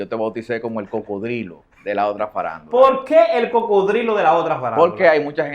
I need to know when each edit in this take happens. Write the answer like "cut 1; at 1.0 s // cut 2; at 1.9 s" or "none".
cut 1; at 1.6 s